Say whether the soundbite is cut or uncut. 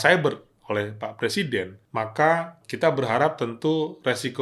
cut